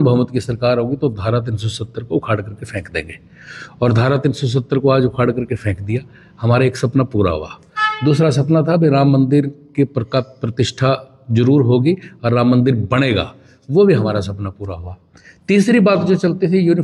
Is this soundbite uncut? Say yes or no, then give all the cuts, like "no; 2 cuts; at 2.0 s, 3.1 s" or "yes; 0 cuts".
yes; 0 cuts